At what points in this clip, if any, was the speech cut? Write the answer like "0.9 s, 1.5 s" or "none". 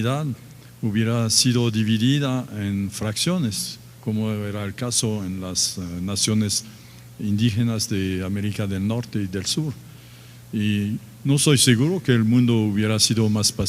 5.2 s